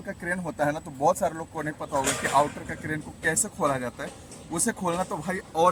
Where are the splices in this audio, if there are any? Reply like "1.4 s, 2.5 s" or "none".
none

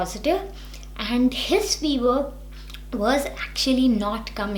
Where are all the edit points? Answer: none

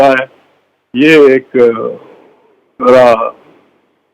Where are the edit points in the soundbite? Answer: none

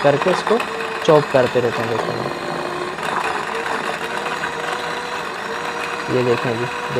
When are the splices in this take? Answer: none

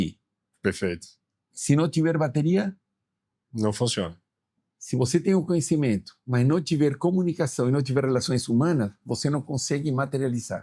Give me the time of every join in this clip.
6.2 s

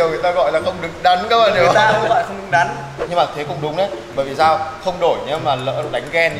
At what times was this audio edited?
2.9 s

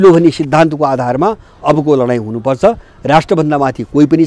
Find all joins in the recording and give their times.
none

